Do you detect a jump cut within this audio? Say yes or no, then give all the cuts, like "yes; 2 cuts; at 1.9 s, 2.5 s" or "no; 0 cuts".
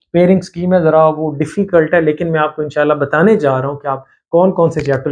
no; 0 cuts